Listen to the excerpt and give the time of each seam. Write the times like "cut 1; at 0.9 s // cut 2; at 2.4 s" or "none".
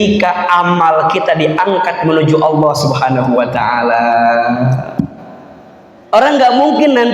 cut 1; at 6.0 s